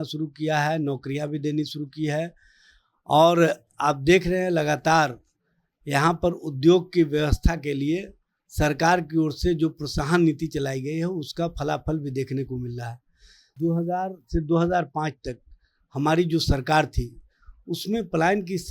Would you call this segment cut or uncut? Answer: cut